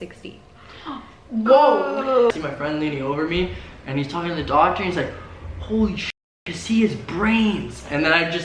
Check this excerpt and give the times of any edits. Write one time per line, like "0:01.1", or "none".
0:02.3